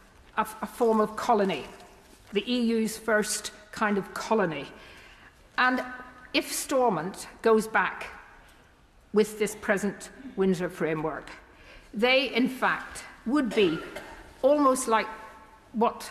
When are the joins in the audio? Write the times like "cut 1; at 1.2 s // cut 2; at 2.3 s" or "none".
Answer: none